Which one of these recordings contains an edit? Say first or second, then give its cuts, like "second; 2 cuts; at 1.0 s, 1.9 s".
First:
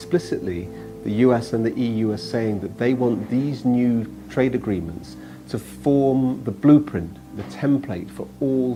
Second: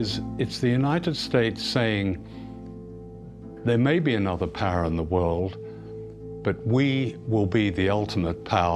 second; 1 cut; at 6.8 s